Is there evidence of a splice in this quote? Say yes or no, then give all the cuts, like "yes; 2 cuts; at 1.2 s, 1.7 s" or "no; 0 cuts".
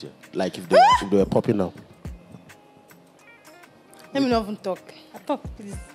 no; 0 cuts